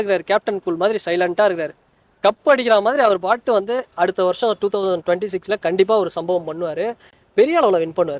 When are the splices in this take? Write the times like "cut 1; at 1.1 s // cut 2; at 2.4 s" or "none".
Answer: none